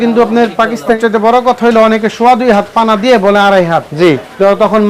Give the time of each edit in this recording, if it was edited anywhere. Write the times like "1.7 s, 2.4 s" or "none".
1.0 s